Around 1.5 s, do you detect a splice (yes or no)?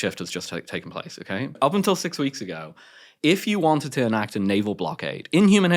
yes